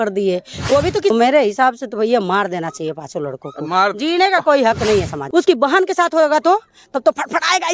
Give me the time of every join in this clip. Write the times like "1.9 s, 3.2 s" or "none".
1.1 s, 5.2 s